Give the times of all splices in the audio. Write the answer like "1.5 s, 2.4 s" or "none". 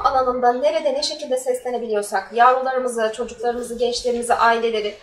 none